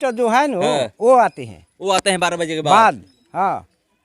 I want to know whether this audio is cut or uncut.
uncut